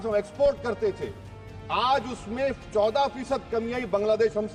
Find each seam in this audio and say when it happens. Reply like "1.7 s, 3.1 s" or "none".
none